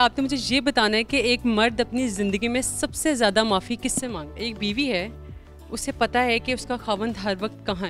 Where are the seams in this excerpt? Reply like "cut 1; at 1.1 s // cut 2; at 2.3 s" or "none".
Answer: cut 1; at 4.3 s